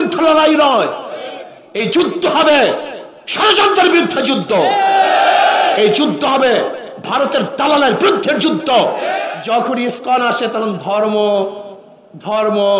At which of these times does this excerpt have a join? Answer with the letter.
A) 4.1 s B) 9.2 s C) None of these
B